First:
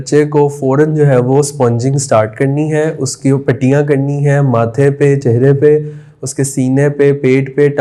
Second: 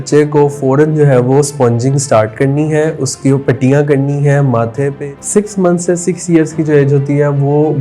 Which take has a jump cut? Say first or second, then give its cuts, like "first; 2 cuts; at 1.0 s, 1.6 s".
second; 1 cut; at 5.0 s